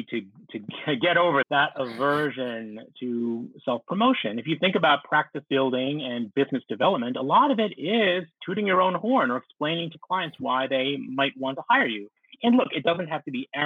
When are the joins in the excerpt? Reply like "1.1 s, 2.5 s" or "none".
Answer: 1.4 s